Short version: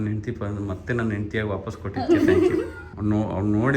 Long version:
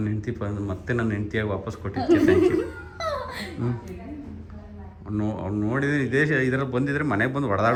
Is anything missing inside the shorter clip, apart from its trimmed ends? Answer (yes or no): yes